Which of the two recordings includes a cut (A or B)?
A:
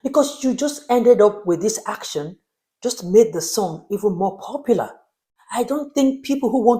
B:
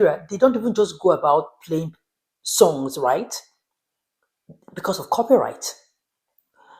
A